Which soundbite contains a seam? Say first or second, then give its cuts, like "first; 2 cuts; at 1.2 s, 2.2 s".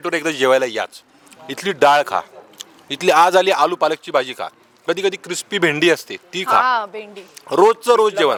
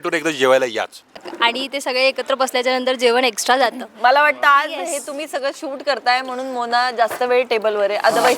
second; 1 cut; at 1.3 s